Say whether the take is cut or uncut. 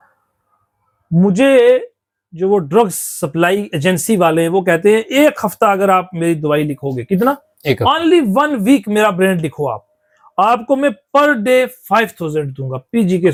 uncut